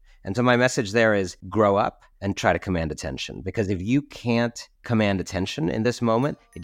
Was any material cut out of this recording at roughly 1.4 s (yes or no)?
yes